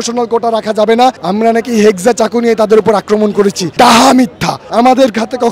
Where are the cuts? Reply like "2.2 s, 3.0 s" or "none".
1.1 s, 4.5 s